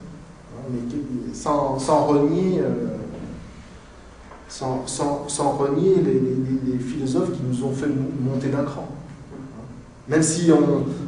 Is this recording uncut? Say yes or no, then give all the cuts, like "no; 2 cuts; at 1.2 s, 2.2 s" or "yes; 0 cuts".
yes; 0 cuts